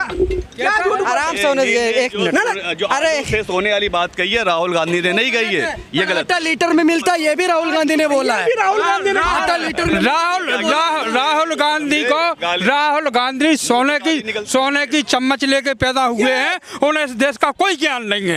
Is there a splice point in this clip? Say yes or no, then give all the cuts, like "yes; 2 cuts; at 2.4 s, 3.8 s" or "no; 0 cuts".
no; 0 cuts